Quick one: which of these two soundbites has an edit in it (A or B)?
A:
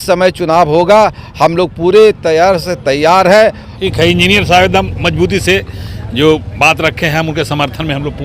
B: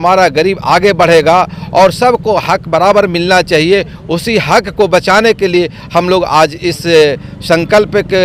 A